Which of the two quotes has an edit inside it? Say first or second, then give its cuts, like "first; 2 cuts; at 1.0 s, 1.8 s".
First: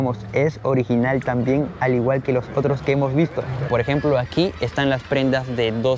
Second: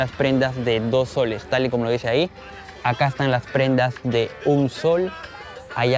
first; 1 cut; at 3.6 s